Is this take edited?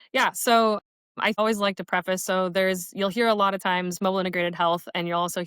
yes; 1 cut; at 1.2 s

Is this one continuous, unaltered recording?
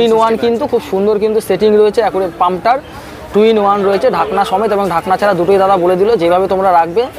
yes; 0 cuts

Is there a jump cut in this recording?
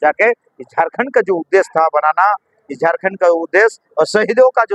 no; 0 cuts

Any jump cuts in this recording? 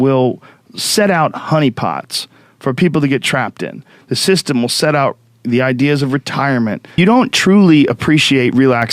yes; 1 cut; at 7.0 s

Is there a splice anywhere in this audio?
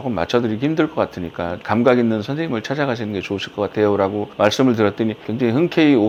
no; 0 cuts

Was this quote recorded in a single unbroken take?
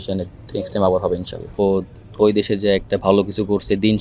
no; 1 cut; at 1.5 s

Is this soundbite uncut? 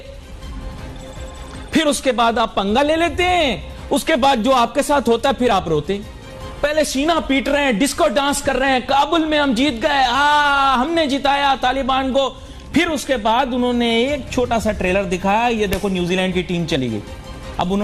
yes; 0 cuts

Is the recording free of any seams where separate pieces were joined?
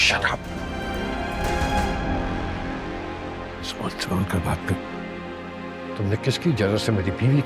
yes; 0 cuts

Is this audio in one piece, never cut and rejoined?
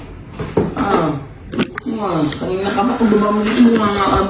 yes; 0 cuts

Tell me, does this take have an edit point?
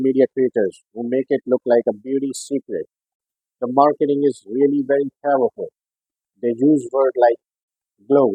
no; 0 cuts

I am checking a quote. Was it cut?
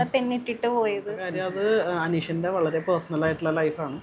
yes; 1 cut; at 1.2 s

